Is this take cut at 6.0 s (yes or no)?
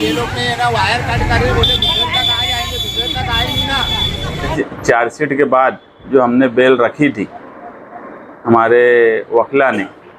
no